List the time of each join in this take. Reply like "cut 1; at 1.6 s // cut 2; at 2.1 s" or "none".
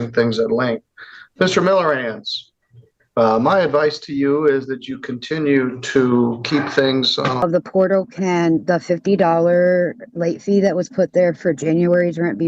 cut 1; at 7.4 s